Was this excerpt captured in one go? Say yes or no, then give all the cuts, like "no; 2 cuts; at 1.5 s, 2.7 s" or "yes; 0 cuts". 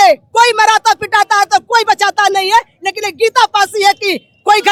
yes; 0 cuts